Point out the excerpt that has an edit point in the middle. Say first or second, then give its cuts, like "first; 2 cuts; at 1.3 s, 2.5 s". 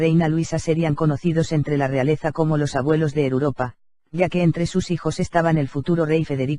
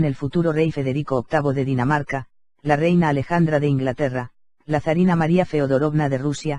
first; 1 cut; at 1.0 s